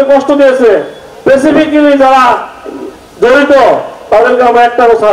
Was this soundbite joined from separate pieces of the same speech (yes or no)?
no